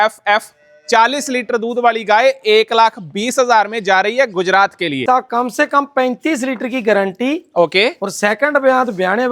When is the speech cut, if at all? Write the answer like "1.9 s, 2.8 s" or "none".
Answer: 5.0 s